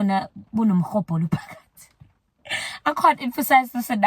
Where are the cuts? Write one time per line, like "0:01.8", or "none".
none